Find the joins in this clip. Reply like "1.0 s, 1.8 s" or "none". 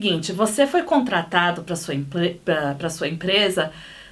none